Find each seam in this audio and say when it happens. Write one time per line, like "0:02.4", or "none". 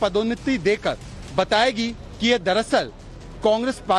none